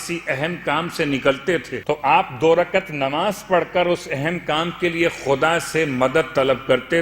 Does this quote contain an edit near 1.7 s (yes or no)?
yes